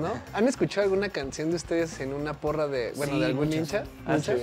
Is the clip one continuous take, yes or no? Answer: yes